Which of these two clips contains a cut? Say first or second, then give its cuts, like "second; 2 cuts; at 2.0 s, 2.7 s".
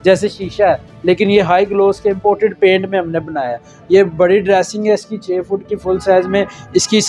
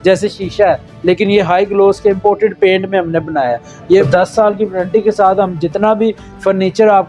second; 1 cut; at 4.1 s